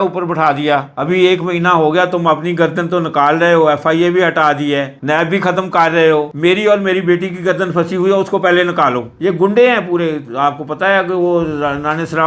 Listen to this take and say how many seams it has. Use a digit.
2